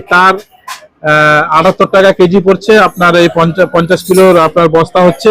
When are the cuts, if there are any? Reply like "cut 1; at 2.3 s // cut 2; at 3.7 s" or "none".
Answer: none